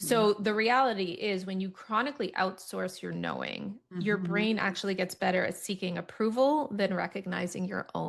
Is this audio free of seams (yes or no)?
yes